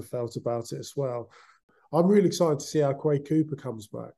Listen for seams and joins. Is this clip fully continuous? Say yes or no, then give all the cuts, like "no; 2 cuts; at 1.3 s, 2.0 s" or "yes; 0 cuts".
no; 1 cut; at 1.6 s